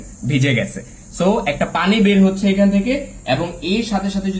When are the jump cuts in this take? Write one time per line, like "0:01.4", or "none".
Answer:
none

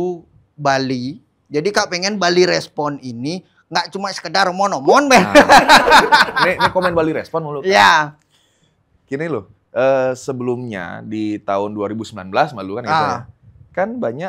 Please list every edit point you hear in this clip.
none

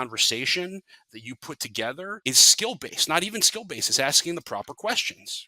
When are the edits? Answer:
0:02.2

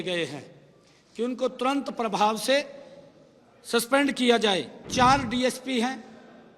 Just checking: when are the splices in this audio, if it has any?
0:04.8

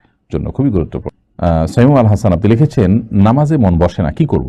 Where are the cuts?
0:01.1

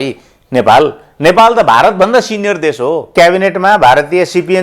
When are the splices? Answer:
0:03.1

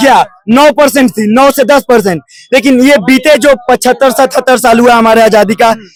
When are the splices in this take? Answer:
none

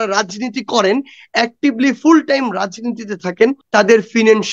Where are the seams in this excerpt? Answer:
0:03.6

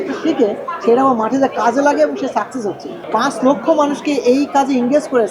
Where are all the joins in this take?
0:03.0

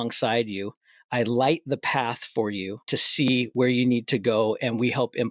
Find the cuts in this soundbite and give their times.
0:02.8

